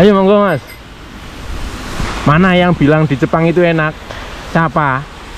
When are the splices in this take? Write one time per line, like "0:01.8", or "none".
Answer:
0:02.1

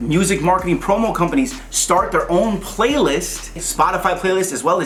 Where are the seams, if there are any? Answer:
none

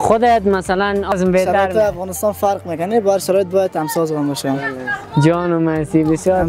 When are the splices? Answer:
0:01.1

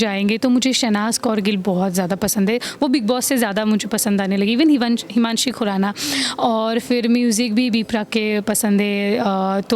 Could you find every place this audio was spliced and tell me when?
none

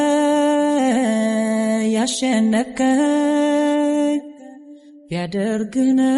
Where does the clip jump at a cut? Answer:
none

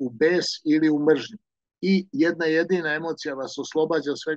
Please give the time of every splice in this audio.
none

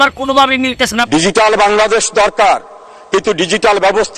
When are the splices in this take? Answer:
0:01.0

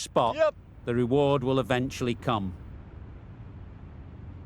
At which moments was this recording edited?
0:02.5

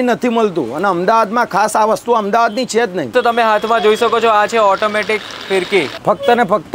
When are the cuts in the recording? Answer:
0:03.1
0:05.9

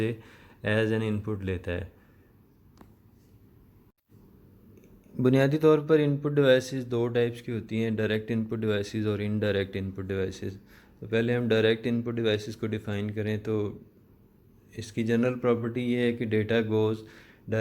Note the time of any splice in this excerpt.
0:03.9

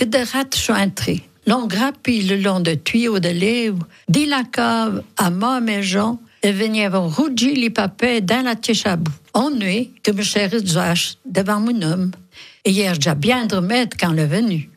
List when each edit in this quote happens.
0:09.2

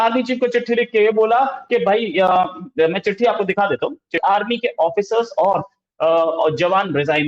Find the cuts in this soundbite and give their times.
0:04.2

